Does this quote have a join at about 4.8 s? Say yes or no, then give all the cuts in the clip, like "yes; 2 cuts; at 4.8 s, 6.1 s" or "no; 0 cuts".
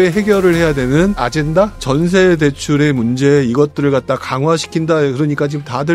no; 1 cut; at 1.7 s